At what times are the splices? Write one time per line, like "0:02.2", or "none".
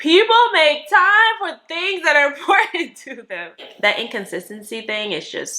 0:03.7